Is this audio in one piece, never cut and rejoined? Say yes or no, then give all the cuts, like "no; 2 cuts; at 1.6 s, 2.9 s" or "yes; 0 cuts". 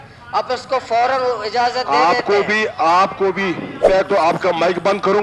no; 1 cut; at 3.9 s